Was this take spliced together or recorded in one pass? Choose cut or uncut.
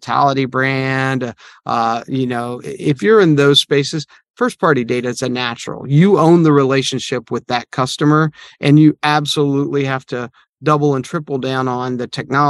uncut